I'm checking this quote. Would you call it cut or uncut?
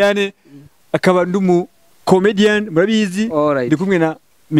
uncut